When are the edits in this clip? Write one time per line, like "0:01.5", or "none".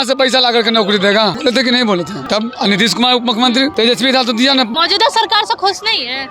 0:01.4
0:02.2
0:03.7
0:04.7